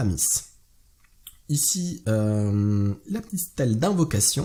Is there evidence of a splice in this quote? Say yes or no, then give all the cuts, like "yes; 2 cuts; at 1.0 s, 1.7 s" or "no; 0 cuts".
no; 0 cuts